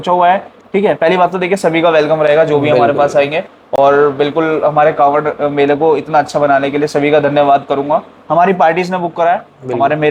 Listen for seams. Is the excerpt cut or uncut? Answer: uncut